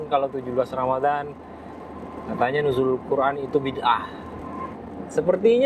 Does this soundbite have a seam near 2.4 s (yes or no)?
no